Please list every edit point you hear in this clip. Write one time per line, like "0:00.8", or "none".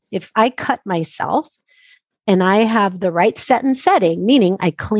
none